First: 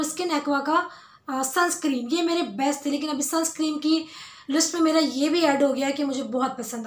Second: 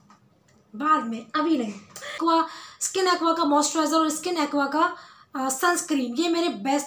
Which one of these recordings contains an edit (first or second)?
second